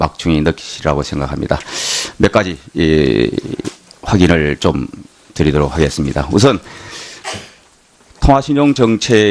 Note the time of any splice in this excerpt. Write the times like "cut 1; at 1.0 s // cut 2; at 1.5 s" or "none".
cut 1; at 3.6 s